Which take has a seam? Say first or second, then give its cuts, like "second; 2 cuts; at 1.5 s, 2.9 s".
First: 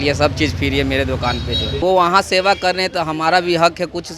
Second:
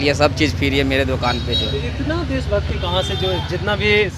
first; 1 cut; at 1.8 s